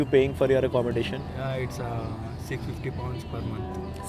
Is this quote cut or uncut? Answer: uncut